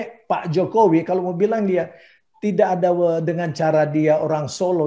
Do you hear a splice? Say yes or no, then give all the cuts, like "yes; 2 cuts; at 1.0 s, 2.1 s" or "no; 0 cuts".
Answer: no; 0 cuts